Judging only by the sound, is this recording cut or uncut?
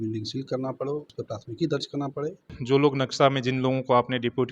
cut